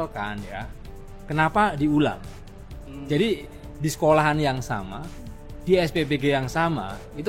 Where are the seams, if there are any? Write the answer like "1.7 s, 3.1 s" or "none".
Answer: none